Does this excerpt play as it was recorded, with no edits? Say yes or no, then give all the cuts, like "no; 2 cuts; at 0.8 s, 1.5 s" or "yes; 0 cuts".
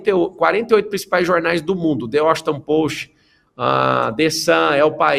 yes; 0 cuts